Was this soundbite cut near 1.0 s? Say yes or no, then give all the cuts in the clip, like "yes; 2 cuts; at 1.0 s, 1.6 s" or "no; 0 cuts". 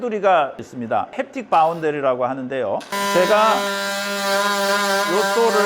yes; 2 cuts; at 1.0 s, 2.9 s